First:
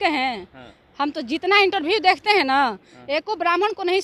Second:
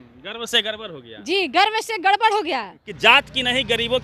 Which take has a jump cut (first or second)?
second